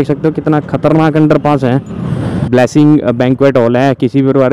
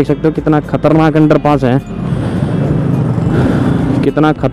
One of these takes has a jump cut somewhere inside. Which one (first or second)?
first